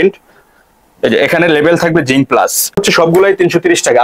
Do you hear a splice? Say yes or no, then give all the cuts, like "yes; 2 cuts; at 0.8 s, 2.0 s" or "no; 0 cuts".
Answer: yes; 1 cut; at 2.8 s